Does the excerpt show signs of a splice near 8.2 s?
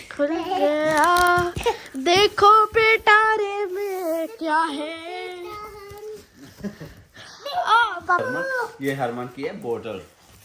yes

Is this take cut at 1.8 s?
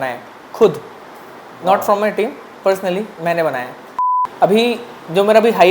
no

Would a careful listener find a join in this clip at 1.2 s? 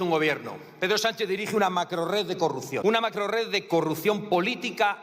no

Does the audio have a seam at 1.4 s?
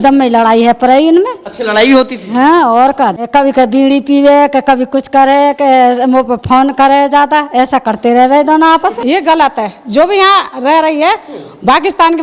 no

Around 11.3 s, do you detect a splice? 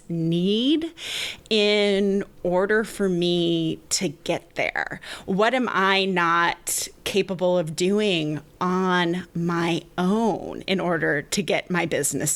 yes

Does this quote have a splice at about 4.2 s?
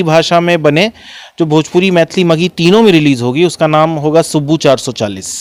no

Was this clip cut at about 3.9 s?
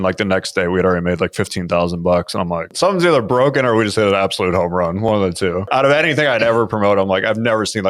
no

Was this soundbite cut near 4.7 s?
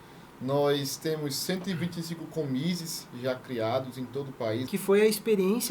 yes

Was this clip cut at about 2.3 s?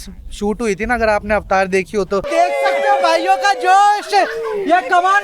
yes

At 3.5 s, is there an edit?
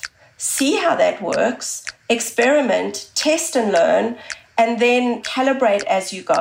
no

